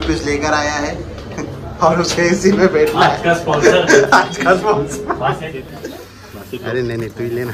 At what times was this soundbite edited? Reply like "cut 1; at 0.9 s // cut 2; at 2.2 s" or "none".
cut 1; at 5.7 s